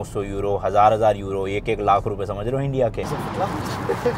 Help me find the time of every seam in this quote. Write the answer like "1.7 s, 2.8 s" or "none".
3.0 s